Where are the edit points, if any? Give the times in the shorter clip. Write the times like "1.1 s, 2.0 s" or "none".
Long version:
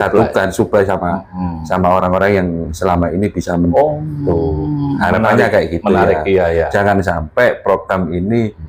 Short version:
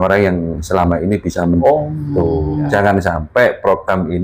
2.7 s